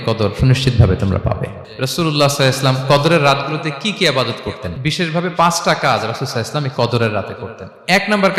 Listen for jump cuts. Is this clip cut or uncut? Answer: cut